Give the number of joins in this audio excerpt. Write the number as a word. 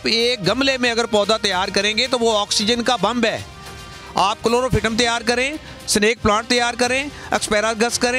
zero